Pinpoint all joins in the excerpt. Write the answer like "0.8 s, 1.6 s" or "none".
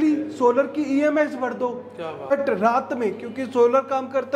2.3 s